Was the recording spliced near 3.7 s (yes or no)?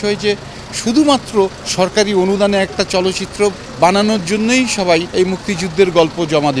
yes